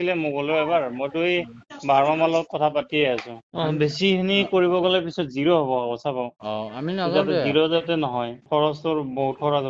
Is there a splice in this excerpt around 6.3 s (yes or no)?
no